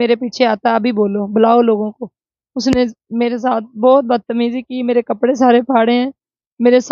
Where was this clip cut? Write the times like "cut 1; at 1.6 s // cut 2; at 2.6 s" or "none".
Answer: none